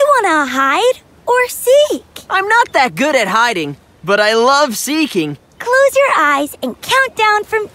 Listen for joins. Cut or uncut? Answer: uncut